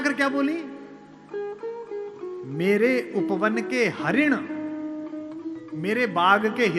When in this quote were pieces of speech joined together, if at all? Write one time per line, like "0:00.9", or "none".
none